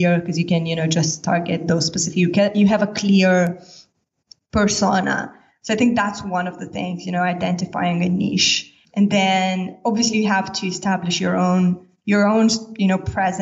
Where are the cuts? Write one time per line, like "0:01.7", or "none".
none